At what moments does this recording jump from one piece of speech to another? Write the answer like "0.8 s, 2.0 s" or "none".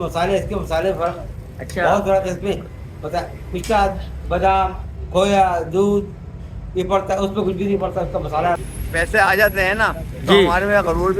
8.6 s